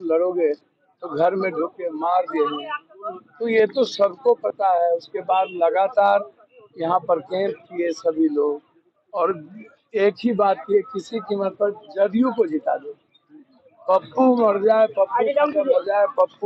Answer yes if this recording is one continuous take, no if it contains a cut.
yes